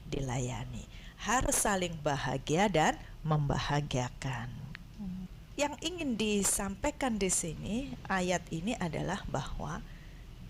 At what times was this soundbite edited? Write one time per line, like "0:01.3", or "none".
0:05.3